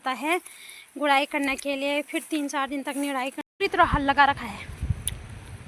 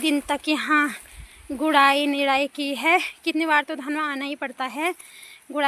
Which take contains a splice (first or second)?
first